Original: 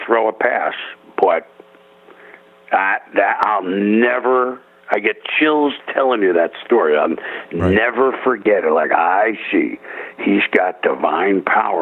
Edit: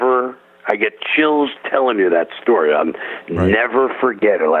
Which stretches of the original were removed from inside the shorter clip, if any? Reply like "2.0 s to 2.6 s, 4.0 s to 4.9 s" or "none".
none